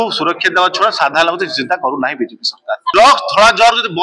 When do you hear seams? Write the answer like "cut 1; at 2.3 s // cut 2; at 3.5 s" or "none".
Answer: cut 1; at 2.9 s